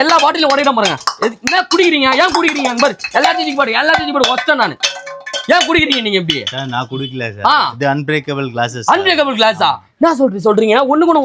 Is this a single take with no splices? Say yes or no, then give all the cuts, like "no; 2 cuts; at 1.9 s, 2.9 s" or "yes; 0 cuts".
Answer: yes; 0 cuts